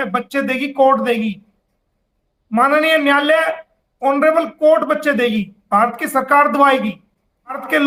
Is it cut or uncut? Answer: uncut